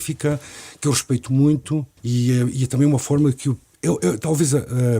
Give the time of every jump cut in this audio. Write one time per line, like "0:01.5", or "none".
0:02.0
0:03.7